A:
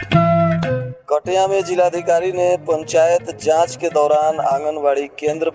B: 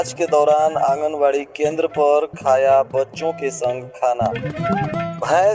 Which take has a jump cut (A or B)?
A